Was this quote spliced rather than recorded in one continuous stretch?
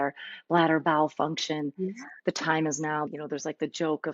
yes; 1 cut; at 3.1 s

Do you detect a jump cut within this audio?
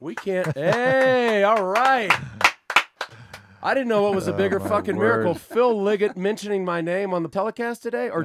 yes; 1 cut; at 7.3 s

